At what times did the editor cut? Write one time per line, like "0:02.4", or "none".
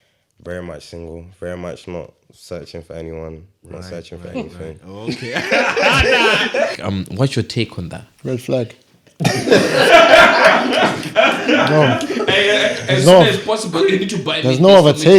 0:06.7